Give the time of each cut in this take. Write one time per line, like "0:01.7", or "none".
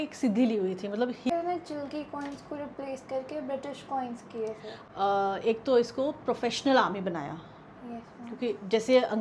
0:01.3
0:04.7